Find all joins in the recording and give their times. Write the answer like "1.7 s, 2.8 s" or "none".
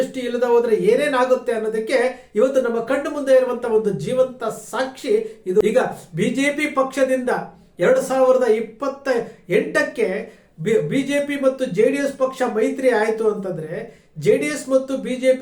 5.6 s